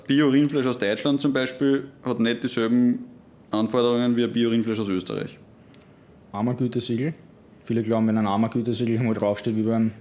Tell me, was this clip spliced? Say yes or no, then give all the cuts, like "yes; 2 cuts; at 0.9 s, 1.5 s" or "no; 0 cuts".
no; 0 cuts